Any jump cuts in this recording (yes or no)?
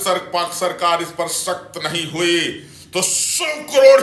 no